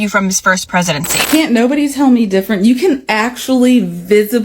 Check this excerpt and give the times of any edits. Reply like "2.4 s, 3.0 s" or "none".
1.1 s